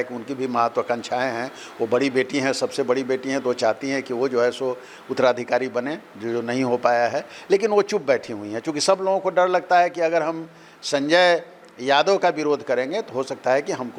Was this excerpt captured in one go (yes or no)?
yes